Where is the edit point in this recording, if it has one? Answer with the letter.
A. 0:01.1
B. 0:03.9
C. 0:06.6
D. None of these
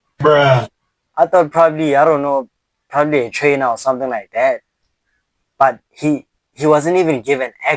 A